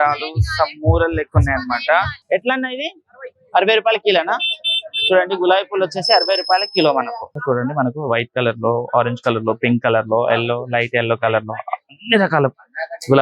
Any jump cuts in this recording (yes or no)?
yes